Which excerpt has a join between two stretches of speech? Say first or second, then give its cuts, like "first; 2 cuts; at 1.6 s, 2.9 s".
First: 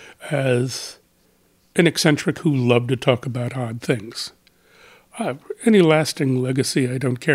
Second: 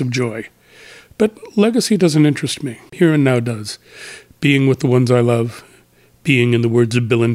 second; 1 cut; at 2.9 s